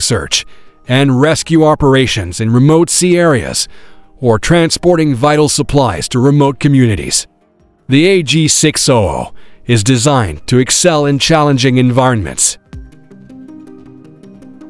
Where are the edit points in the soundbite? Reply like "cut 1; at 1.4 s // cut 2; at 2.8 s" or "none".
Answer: cut 1; at 12.6 s